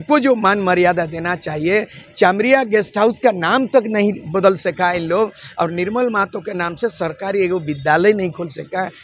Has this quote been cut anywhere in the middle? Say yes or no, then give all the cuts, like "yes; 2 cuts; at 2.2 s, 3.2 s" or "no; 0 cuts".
no; 0 cuts